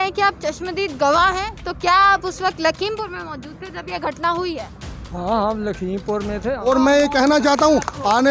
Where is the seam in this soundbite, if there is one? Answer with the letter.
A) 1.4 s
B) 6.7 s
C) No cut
B